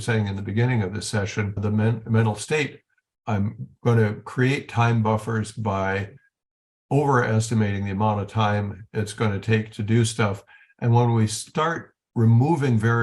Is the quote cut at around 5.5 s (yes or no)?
no